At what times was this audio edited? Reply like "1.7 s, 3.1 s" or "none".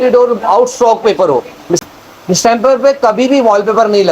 1.8 s